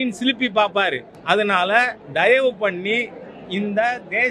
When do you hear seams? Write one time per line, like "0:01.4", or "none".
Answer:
0:01.1
0:02.0